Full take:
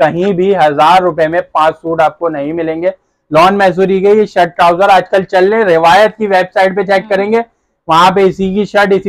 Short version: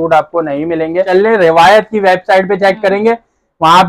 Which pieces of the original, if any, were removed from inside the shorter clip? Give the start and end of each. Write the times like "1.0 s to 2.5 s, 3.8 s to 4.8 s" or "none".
2.9 s to 5.3 s